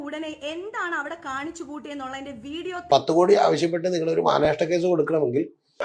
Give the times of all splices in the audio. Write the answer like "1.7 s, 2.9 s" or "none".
2.7 s